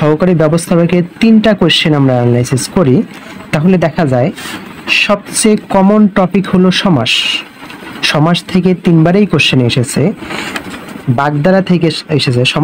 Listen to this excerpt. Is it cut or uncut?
uncut